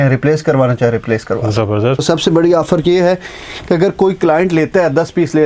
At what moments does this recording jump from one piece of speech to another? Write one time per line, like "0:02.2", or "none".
0:02.0